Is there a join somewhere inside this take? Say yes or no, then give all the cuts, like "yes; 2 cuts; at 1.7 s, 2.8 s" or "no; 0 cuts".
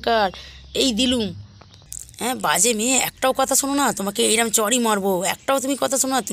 no; 0 cuts